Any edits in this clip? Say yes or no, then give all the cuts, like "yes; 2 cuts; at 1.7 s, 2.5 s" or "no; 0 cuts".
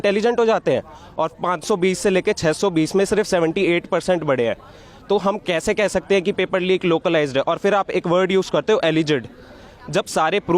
no; 0 cuts